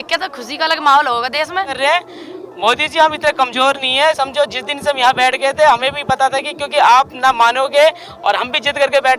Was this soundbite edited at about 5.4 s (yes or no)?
no